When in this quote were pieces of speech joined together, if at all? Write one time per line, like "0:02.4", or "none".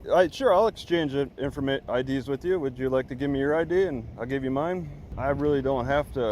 0:05.0